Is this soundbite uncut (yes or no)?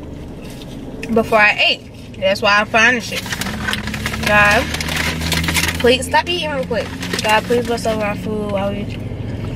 yes